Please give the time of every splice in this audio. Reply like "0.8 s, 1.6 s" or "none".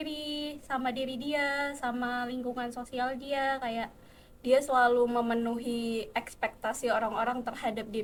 none